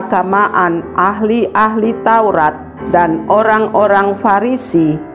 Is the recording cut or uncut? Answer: cut